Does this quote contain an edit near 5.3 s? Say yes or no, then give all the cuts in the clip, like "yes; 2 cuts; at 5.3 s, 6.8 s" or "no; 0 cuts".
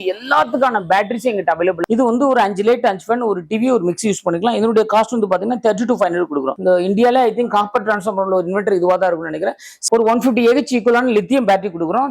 no; 3 cuts; at 1.8 s, 6.5 s, 9.8 s